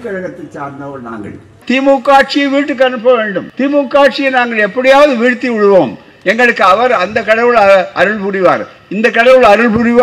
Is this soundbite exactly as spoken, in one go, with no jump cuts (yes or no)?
no